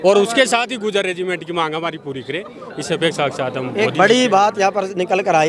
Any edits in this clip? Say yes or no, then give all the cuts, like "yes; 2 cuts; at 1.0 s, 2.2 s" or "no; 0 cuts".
no; 0 cuts